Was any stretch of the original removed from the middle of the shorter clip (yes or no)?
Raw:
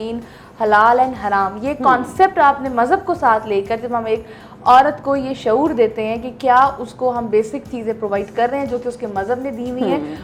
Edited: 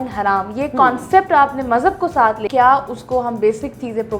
yes